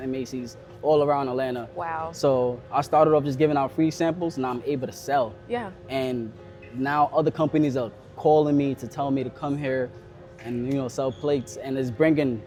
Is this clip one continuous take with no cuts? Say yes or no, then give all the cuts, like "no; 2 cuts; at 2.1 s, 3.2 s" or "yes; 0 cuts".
yes; 0 cuts